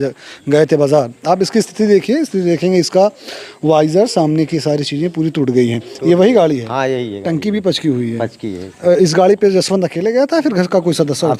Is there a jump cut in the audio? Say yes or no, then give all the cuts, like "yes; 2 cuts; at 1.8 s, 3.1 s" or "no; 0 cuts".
no; 0 cuts